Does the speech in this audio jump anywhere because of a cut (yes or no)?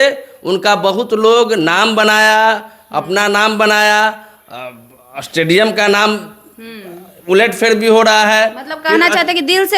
no